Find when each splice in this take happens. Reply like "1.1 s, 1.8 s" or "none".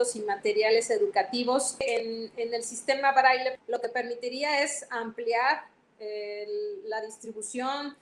none